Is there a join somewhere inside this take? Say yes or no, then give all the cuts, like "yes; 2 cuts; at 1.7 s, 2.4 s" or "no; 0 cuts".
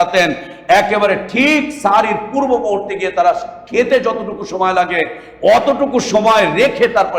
no; 0 cuts